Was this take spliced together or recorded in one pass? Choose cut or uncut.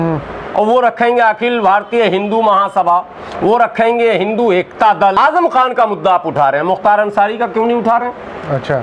cut